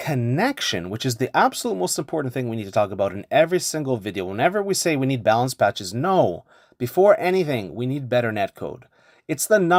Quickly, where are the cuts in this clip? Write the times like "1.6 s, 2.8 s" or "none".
none